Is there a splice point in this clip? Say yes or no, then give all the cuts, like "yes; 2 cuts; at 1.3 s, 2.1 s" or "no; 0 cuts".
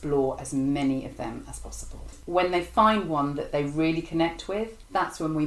yes; 1 cut; at 2.2 s